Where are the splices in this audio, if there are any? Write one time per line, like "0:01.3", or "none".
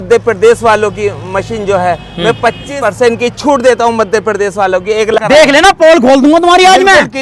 0:02.6
0:05.2